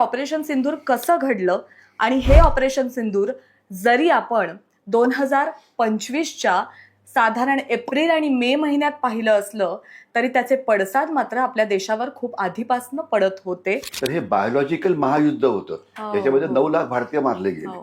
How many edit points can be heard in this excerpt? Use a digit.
1